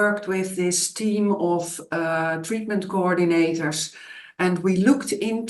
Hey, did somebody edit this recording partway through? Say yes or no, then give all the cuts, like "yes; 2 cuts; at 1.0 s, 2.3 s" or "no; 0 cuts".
no; 0 cuts